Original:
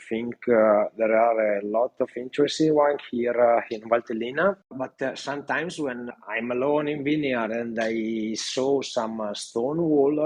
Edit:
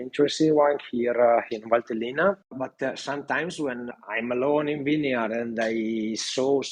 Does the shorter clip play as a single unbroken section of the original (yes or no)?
yes